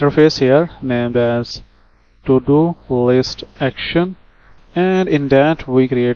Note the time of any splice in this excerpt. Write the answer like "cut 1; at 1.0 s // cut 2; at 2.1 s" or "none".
none